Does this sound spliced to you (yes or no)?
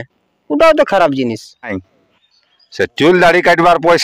yes